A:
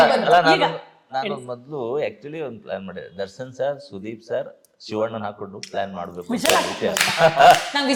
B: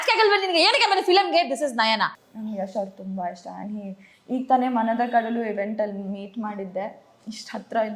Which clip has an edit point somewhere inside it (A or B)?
B